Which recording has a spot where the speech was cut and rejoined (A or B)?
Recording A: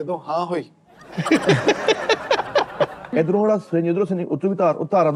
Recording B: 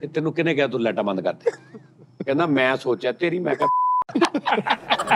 A